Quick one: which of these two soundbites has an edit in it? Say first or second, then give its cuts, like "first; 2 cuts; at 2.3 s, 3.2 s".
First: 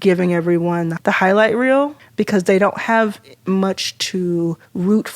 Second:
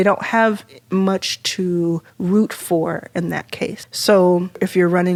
first; 1 cut; at 0.9 s